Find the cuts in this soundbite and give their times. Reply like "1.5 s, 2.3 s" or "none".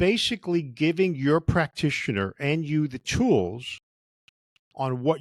none